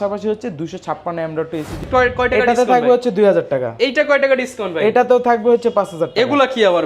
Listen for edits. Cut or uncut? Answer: cut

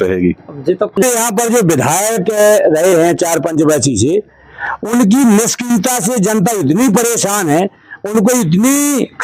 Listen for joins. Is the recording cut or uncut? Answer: cut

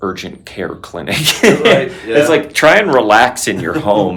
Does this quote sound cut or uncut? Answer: uncut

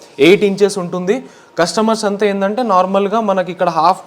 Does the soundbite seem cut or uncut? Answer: uncut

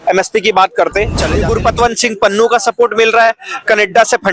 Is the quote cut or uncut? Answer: cut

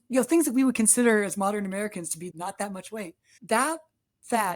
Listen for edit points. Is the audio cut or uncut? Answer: cut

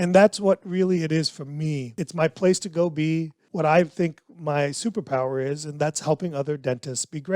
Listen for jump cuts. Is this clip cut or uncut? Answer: cut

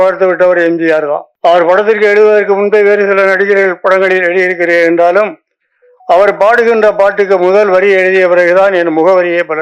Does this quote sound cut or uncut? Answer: cut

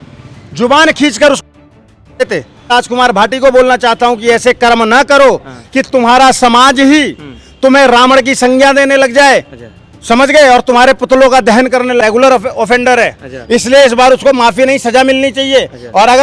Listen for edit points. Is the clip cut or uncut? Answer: cut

